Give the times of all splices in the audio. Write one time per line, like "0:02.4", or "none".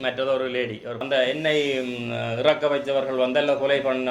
0:01.0